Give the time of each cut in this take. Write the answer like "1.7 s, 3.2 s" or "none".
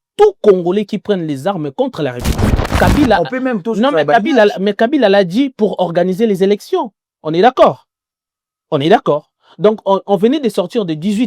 2.7 s

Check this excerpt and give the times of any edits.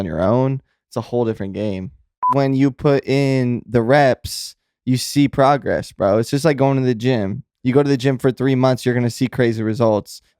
2.2 s

